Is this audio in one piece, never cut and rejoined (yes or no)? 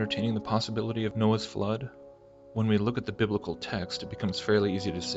no